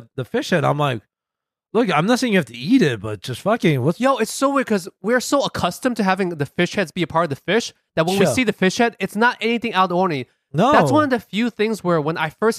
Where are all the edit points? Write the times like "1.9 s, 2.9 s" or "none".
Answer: none